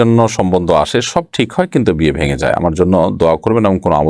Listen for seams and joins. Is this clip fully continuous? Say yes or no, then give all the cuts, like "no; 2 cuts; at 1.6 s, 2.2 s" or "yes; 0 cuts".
yes; 0 cuts